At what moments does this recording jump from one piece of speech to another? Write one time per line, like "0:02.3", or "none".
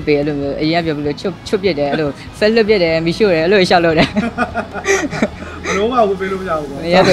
none